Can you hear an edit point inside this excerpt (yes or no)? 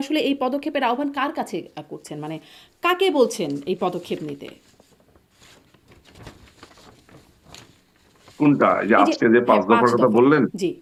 no